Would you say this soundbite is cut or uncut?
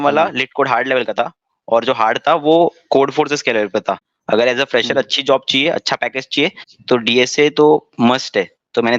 cut